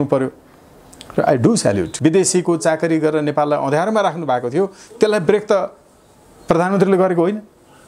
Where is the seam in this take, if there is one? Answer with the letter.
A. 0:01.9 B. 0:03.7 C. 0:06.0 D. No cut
A